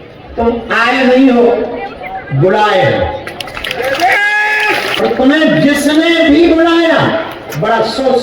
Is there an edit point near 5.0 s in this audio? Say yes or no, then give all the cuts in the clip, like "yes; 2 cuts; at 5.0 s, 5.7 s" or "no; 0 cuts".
yes; 1 cut; at 5.0 s